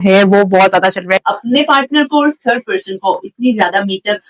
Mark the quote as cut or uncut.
cut